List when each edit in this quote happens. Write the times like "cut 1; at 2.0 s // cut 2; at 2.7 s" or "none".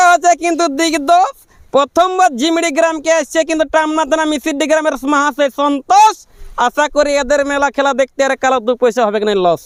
none